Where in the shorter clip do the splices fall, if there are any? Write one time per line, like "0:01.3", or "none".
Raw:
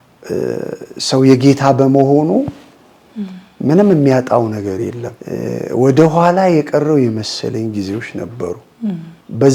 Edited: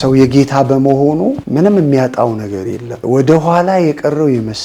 0:01.4
0:02.9

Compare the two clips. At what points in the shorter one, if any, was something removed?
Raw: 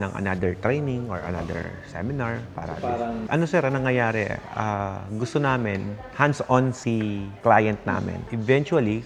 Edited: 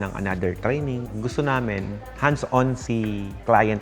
0:01.1

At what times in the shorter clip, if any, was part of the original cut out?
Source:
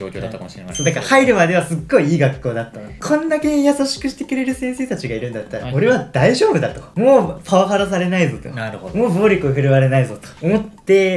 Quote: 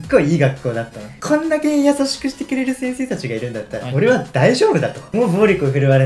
0:05.0

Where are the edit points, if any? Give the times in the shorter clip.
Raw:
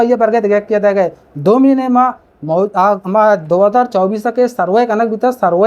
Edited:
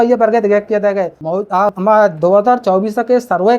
0:01.4

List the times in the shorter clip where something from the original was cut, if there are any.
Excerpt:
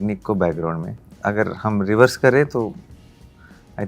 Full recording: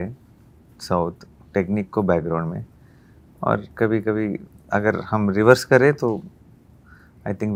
0:01.0

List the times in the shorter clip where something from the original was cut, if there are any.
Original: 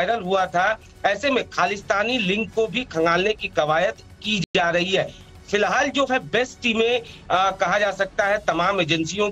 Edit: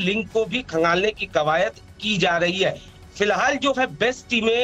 0:02.2

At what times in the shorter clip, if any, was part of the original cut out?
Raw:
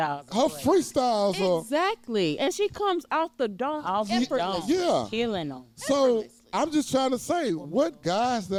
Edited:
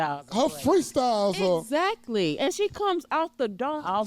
none

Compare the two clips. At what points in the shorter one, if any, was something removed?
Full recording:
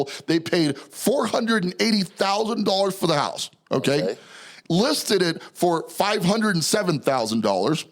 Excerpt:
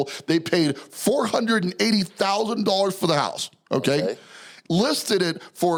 none

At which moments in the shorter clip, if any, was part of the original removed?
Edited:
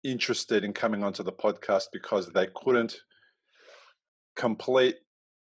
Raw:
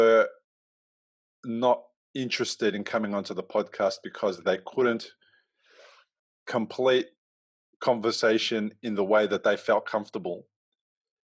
none

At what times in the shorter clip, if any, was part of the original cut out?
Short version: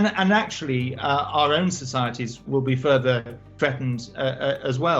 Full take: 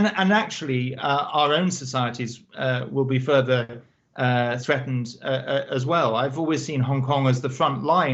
0:02.4
0:03.5

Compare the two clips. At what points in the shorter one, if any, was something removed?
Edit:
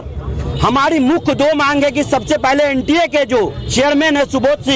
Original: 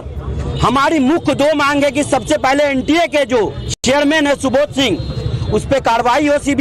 0:03.6

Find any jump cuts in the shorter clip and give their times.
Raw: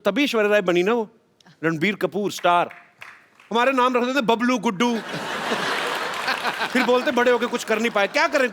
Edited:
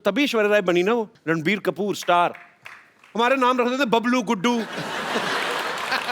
0:01.1

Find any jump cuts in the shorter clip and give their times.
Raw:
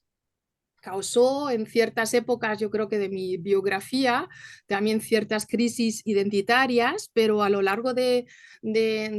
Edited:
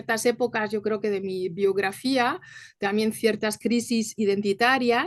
none

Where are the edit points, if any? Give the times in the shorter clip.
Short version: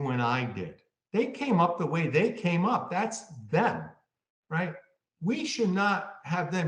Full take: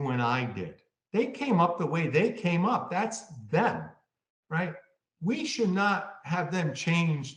none

